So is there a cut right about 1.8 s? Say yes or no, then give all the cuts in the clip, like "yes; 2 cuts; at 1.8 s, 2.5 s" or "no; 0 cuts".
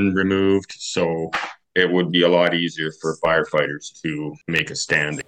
no; 1 cut; at 4.4 s